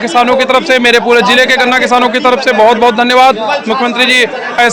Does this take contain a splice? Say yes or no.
no